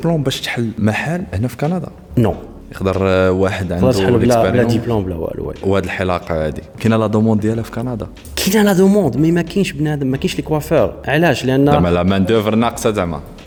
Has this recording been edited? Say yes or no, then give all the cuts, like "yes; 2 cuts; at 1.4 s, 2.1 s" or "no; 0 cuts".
no; 0 cuts